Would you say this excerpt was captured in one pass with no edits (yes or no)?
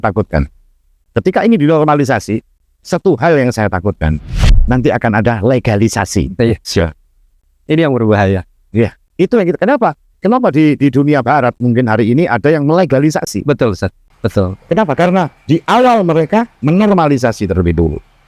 no